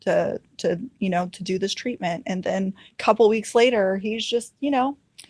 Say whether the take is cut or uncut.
cut